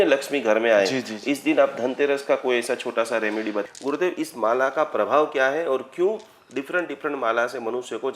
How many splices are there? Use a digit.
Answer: 1